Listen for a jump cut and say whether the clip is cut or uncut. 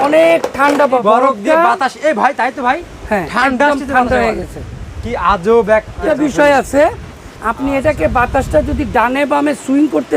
cut